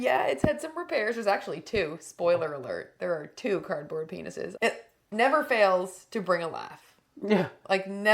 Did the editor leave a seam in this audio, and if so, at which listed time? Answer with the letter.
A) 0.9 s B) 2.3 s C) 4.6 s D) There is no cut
C